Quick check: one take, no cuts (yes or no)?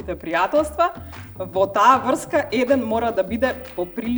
yes